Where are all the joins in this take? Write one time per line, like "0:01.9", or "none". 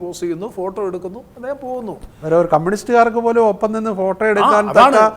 none

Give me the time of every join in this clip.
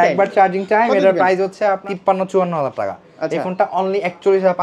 0:01.8

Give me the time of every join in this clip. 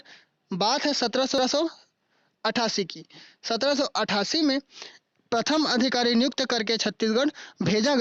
0:01.4

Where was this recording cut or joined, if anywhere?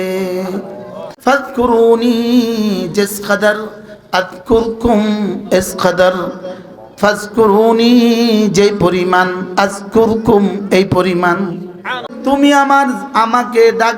0:01.0
0:12.1

